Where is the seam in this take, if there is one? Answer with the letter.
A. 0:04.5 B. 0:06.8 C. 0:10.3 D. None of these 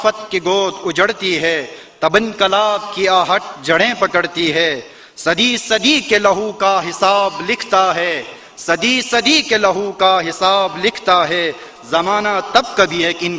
C